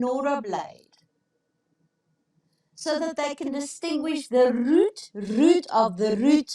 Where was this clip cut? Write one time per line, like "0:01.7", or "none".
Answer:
none